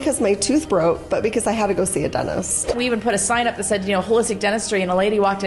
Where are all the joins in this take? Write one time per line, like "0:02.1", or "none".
0:02.7